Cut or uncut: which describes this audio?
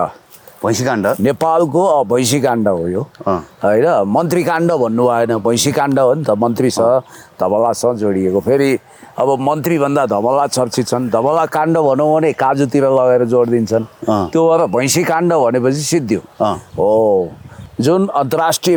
uncut